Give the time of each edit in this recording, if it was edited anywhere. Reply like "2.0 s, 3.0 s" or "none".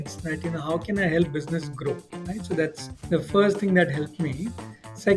2.9 s